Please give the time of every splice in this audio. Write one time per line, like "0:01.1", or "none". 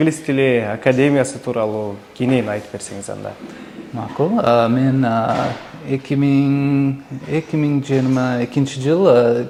none

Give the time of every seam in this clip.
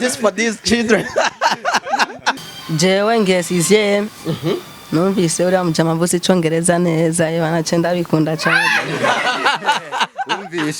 0:02.5

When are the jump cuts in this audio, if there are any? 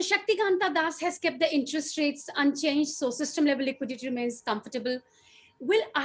none

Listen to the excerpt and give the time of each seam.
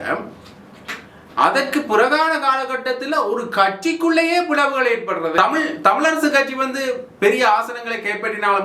0:05.4

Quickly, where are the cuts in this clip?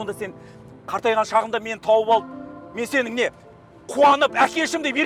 none

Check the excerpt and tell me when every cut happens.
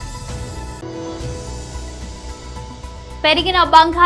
0:00.8
0:03.1

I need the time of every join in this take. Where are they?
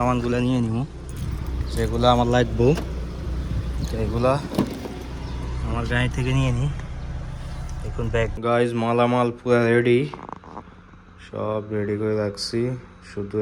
0:08.3

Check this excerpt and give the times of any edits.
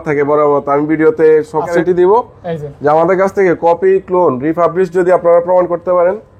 0:01.8

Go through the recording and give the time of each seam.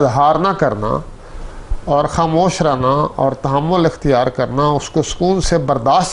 none

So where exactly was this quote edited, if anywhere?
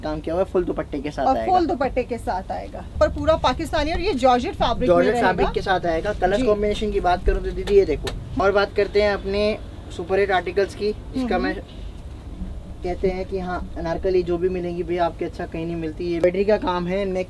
0:02.8
0:08.4
0:16.2

